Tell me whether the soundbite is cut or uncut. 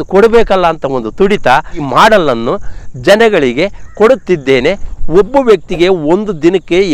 cut